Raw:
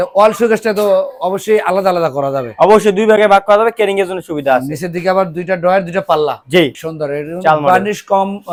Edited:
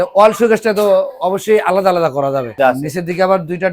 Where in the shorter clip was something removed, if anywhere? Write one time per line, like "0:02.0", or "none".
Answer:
0:02.5